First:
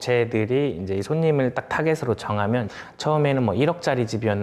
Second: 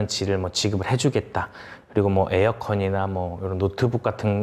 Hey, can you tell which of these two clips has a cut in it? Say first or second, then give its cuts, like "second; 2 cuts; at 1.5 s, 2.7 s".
first; 1 cut; at 2.7 s